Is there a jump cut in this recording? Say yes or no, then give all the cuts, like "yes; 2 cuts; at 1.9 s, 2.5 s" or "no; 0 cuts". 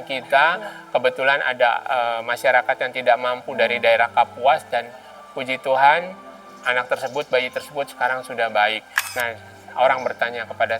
yes; 1 cut; at 9.2 s